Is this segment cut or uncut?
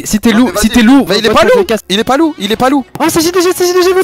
uncut